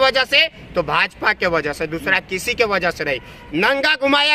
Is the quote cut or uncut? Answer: cut